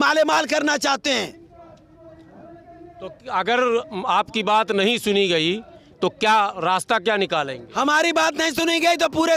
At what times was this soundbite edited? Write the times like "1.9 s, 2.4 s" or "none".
none

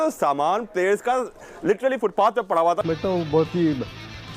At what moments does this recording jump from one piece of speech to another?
2.8 s

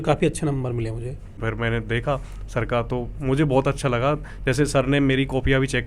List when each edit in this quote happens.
none

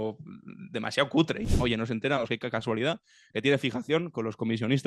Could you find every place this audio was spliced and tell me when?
1.5 s

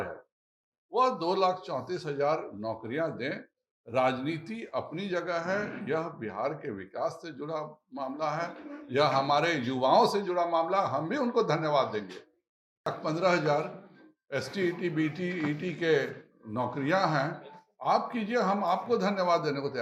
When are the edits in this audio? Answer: 12.9 s

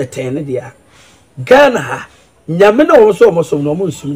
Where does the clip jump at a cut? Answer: none

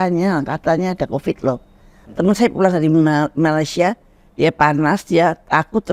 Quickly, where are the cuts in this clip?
none

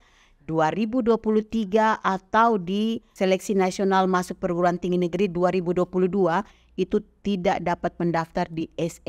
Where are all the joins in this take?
3.1 s

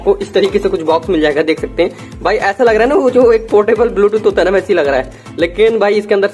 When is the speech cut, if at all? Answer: none

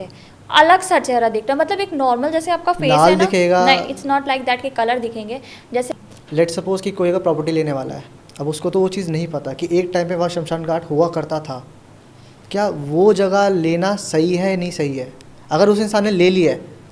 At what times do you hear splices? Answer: 5.9 s

